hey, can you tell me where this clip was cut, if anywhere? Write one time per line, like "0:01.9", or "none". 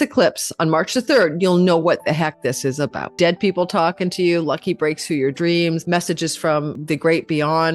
0:03.1
0:05.8
0:06.8